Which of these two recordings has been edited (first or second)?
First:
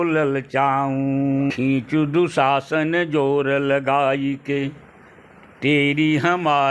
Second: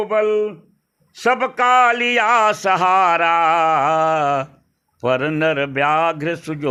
first